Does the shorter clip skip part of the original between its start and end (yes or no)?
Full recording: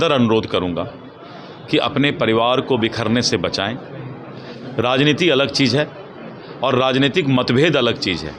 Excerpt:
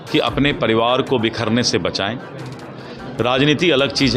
no